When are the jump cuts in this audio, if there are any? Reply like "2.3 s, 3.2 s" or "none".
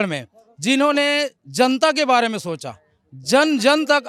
none